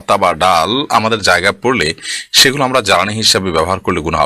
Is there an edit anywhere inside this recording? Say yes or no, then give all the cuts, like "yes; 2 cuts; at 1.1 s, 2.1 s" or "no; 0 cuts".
no; 0 cuts